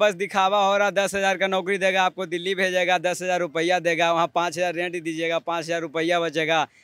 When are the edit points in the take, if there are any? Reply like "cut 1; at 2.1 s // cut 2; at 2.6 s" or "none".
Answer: none